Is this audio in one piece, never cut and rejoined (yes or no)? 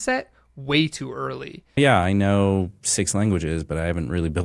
no